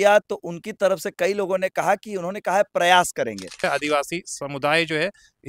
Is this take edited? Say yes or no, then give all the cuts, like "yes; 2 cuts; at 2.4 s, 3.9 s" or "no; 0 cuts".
yes; 1 cut; at 3.6 s